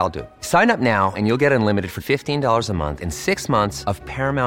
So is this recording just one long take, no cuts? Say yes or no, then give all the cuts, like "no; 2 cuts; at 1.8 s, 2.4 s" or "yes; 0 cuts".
yes; 0 cuts